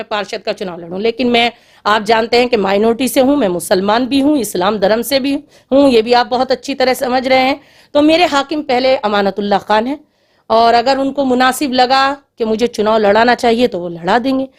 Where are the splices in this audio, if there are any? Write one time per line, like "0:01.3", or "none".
none

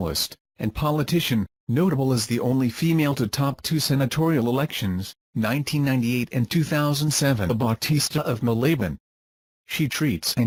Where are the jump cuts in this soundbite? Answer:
none

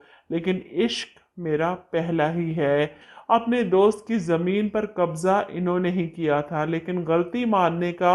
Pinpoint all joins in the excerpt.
0:03.1

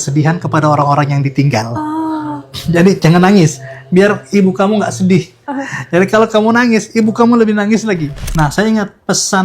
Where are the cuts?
0:08.2

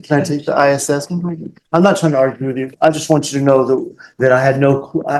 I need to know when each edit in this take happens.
none

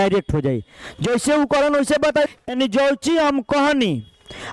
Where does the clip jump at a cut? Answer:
0:02.3

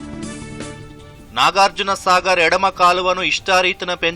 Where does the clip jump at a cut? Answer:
0:01.0

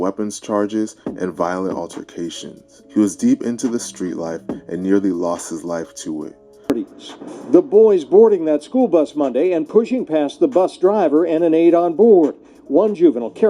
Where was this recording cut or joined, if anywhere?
0:06.7

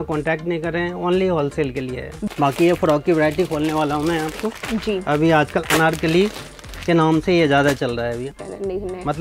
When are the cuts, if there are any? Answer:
0:02.2
0:08.3

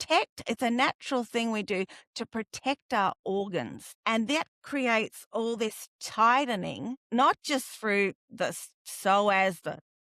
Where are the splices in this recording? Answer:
0:03.8
0:07.0

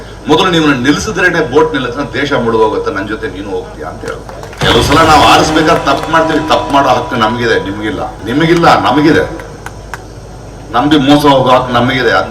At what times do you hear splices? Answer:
0:04.6
0:08.1

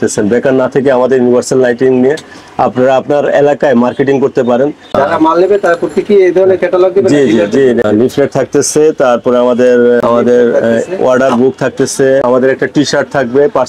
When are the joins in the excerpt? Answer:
0:04.9
0:07.8
0:10.0
0:12.2

